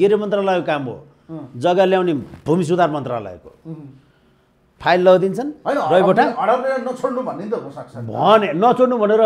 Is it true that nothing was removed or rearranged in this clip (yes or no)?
yes